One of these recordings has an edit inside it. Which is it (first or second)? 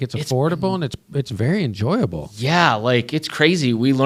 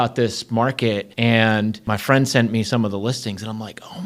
second